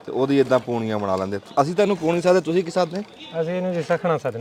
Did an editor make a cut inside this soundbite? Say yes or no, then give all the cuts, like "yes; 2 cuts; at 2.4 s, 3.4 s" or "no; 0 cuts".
no; 0 cuts